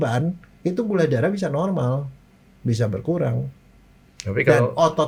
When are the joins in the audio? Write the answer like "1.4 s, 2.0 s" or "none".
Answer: none